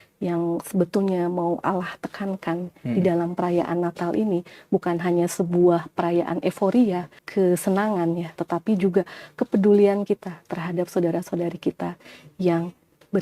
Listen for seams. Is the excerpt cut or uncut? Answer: cut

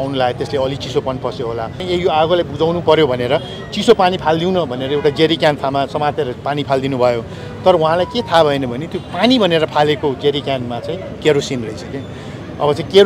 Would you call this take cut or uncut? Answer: cut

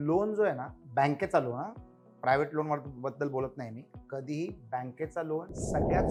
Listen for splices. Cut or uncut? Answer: uncut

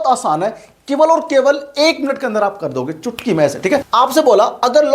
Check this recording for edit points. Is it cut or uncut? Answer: cut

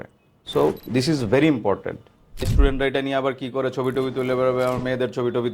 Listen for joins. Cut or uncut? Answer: cut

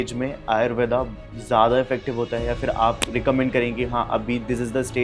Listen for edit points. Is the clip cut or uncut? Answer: cut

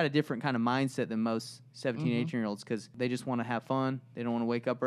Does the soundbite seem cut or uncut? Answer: cut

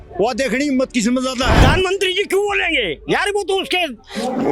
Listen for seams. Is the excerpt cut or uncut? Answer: cut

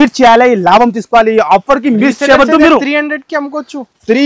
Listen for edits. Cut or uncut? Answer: uncut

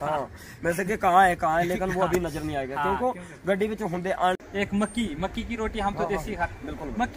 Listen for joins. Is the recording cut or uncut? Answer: cut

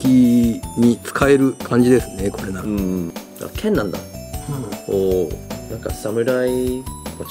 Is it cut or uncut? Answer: cut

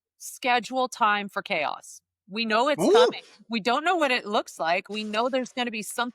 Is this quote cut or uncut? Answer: cut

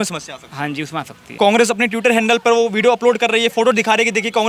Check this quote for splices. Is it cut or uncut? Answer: cut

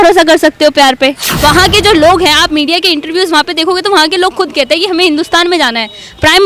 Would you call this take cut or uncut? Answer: cut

